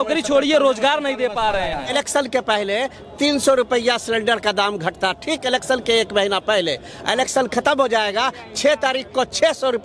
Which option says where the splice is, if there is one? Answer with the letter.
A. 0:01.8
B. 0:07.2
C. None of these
A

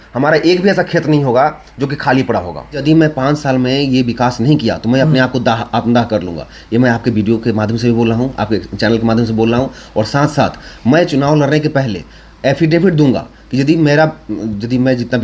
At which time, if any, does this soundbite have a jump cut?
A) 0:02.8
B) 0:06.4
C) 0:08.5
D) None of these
A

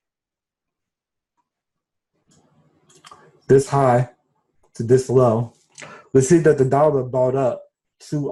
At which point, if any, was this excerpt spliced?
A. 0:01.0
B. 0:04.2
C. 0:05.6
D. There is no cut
D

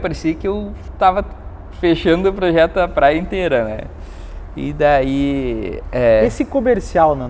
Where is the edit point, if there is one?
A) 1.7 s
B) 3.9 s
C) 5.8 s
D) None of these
D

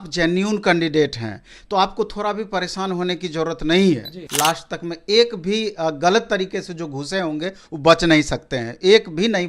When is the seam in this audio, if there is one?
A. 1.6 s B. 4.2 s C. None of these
B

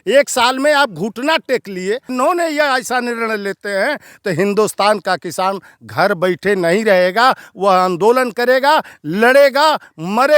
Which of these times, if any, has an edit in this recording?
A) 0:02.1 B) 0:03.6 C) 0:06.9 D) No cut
A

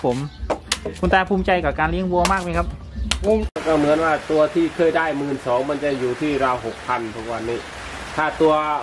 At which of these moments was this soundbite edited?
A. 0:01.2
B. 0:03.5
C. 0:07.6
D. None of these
B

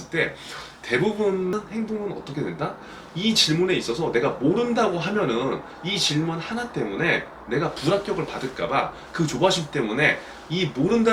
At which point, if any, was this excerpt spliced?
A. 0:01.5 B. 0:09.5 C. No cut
A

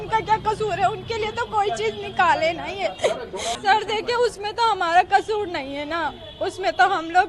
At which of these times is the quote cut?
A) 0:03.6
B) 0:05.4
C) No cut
A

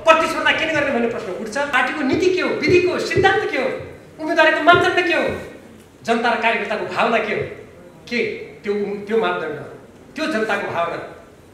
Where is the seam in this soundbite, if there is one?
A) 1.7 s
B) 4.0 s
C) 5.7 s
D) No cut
A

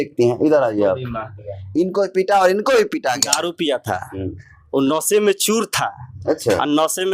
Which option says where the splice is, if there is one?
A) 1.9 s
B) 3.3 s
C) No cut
B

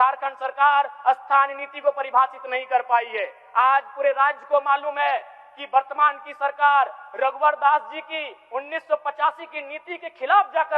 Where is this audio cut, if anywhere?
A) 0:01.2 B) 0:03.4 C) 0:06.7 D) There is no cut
D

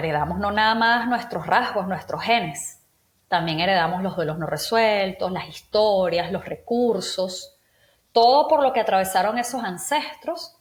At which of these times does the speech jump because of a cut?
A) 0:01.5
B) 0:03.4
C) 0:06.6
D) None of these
D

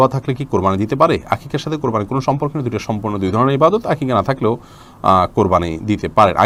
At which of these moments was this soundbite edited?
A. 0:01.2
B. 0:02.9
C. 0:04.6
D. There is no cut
D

